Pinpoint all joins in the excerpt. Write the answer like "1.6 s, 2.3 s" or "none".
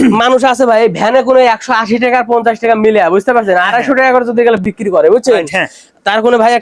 none